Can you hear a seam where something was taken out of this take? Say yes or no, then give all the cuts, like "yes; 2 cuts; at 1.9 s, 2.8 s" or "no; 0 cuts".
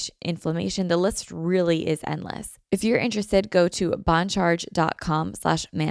yes; 1 cut; at 2.5 s